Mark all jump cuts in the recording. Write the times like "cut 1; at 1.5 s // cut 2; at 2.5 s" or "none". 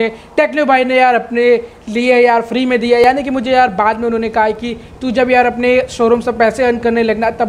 none